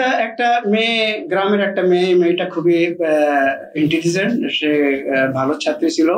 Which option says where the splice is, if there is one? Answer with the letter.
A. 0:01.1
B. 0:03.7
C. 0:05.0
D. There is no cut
D